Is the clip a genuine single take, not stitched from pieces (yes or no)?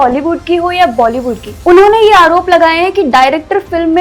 no